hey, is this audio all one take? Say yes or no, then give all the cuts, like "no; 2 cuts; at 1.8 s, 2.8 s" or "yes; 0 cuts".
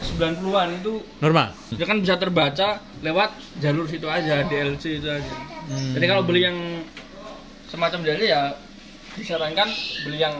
no; 1 cut; at 1.7 s